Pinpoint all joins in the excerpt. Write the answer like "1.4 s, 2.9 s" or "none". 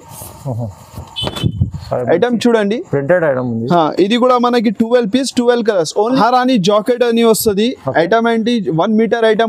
6.2 s